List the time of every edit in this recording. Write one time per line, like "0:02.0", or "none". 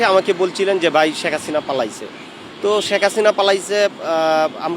none